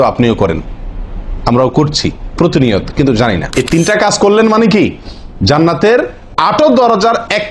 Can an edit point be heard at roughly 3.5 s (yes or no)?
yes